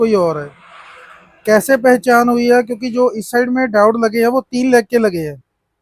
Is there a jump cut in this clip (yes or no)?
no